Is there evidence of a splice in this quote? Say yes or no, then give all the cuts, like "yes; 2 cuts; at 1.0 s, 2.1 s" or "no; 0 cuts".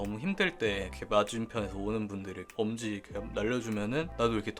yes; 2 cuts; at 0.9 s, 2.5 s